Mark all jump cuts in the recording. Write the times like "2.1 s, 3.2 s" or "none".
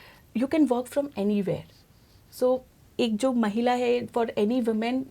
none